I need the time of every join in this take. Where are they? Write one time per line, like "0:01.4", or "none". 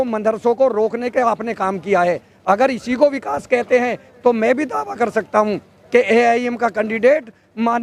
none